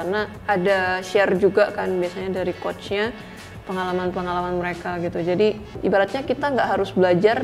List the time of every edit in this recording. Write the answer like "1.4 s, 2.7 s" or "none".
5.7 s